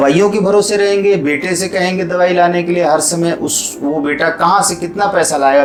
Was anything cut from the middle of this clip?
no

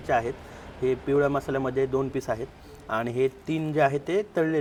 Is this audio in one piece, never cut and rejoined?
yes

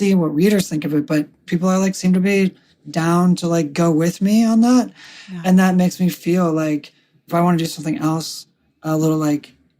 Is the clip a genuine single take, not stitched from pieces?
no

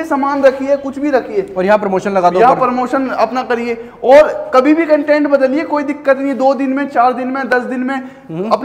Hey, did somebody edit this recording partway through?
no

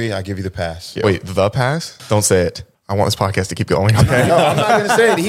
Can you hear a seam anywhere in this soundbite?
yes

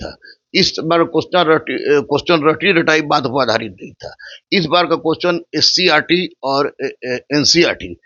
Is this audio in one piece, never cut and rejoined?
yes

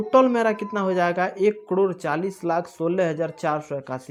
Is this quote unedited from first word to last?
yes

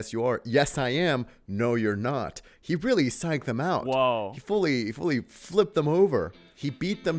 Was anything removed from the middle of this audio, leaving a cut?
no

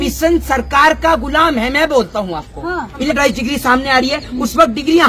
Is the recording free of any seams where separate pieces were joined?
no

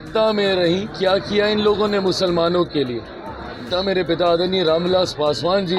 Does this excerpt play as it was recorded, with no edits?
no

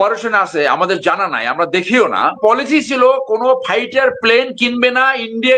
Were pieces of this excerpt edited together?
yes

